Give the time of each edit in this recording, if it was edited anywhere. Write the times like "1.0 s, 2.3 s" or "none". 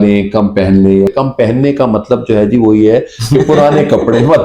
1.1 s